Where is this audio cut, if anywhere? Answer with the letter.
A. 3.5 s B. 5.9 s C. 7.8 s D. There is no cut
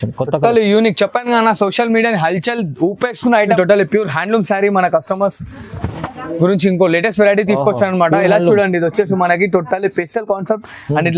A